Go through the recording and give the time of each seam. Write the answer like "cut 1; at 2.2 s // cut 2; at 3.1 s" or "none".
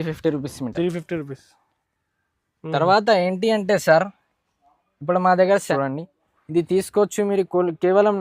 cut 1; at 5.7 s